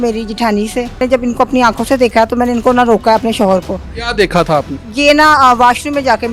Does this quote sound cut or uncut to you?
cut